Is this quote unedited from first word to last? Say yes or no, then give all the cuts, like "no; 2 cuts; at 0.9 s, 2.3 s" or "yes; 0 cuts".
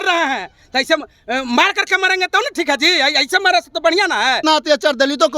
no; 1 cut; at 4.4 s